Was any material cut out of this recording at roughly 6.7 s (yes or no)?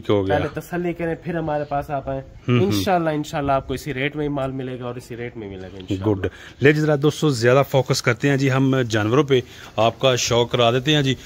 no